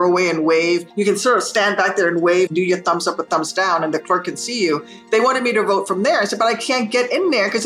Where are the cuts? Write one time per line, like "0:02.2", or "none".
0:00.9
0:02.5